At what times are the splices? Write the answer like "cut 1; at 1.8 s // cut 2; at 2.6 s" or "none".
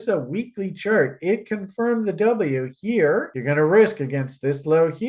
cut 1; at 3.3 s